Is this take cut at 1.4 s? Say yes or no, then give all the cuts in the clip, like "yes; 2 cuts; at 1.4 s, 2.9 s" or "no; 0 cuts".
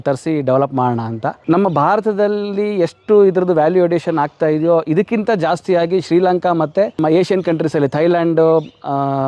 yes; 2 cuts; at 1.4 s, 7.0 s